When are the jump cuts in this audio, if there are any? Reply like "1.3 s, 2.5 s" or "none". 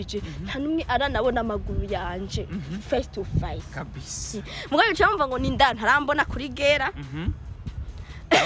none